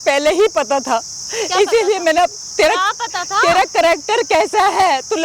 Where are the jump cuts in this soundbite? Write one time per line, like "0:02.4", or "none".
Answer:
none